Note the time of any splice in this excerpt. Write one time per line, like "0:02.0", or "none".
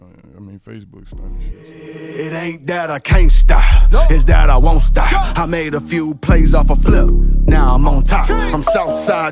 0:01.5